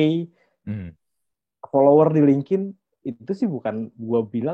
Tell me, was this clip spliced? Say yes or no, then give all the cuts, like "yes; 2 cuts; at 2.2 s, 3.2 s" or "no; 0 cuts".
no; 0 cuts